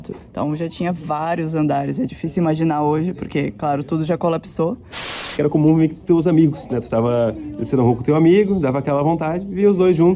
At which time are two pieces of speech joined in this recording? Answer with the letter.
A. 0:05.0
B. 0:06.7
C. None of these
A